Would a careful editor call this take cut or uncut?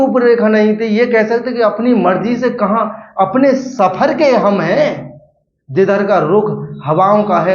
uncut